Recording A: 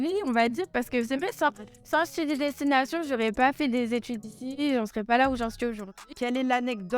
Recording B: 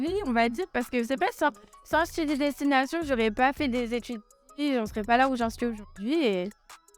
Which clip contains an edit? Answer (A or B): A